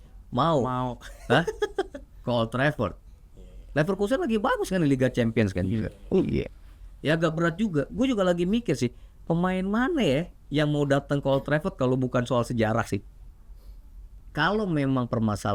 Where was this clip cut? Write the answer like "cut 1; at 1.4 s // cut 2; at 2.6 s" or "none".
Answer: cut 1; at 14.2 s